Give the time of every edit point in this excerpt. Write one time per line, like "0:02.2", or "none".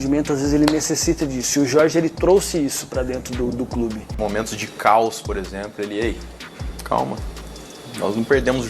0:04.1